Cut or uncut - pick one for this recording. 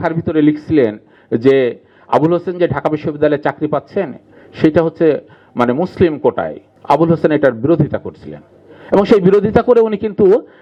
uncut